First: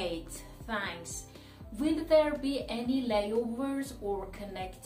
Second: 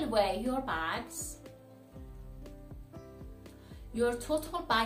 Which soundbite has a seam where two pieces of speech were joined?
second; 2 cuts; at 1.1 s, 3.8 s

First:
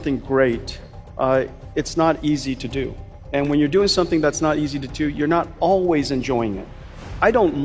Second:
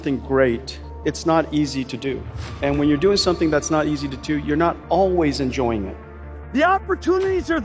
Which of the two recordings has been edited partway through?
second; 2 cuts; at 0.9 s, 6.3 s

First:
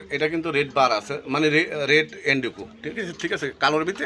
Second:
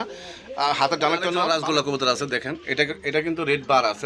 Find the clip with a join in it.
second; 1 cut; at 1.4 s

